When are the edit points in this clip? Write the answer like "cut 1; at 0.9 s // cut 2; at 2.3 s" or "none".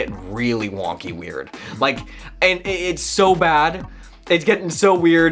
none